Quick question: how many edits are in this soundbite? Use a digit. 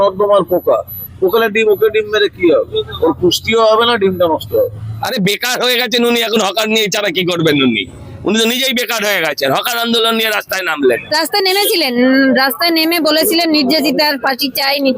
2